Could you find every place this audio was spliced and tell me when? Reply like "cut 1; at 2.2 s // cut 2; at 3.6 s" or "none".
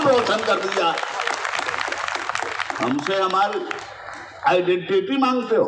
none